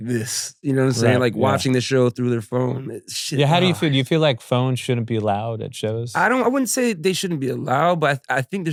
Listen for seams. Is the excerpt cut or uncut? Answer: uncut